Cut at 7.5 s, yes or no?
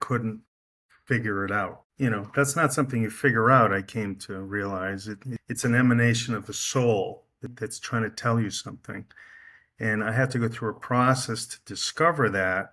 yes